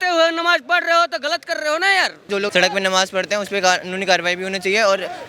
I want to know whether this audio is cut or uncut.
cut